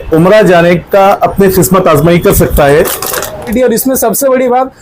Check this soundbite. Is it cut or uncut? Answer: cut